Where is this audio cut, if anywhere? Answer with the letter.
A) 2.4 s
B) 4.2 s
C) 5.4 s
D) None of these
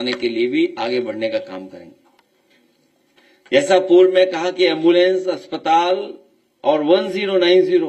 D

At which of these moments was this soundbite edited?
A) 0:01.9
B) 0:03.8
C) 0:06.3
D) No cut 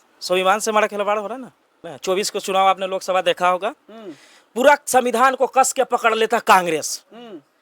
A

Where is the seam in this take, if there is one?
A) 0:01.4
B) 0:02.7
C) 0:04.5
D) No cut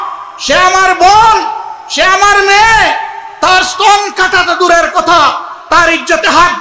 D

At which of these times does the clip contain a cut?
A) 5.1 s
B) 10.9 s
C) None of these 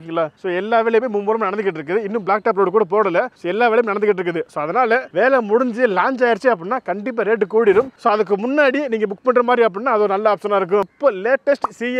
B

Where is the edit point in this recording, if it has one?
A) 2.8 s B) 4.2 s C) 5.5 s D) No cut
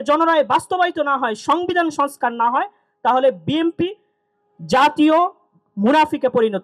D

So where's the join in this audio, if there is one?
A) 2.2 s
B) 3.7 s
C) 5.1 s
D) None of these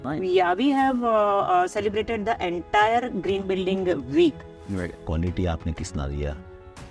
C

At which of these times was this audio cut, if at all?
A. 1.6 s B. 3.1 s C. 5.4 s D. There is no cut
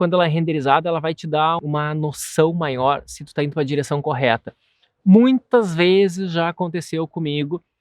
A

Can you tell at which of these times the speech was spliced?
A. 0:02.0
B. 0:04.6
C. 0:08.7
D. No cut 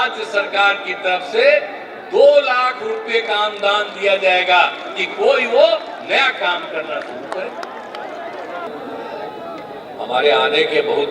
C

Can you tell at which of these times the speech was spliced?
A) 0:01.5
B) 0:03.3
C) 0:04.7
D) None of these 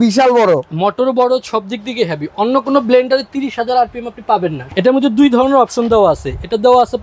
C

